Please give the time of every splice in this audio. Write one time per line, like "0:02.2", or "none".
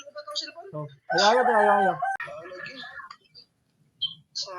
0:02.2